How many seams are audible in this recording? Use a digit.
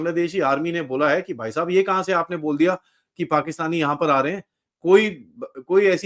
0